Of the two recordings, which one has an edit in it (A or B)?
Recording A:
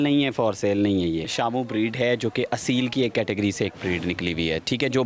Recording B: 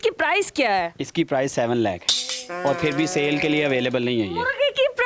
A